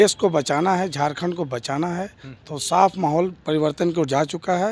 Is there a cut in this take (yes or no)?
no